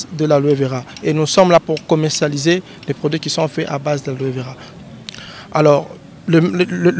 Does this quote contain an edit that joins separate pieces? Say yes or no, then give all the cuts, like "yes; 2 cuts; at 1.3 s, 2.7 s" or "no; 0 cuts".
yes; 1 cut; at 4.6 s